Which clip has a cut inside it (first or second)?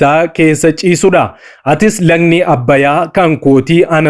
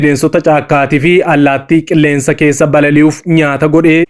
first